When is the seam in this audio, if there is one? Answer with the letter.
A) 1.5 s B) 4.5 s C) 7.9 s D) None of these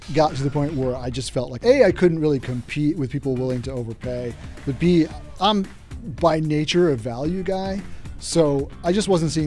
A